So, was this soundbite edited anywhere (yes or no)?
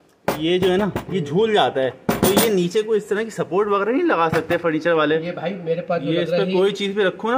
no